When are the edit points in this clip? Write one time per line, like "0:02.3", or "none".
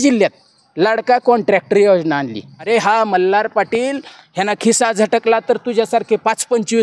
0:02.6

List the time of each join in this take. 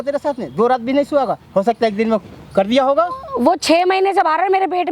none

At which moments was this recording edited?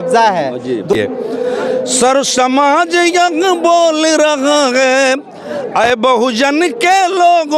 0:00.9

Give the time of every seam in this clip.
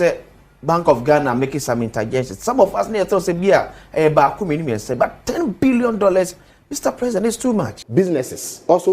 0:07.8

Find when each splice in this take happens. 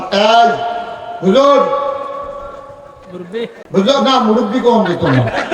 0:03.6

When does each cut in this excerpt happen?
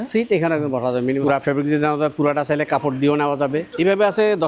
0:01.2
0:03.7

